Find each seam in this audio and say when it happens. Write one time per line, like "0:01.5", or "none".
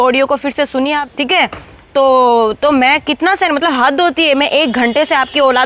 0:01.0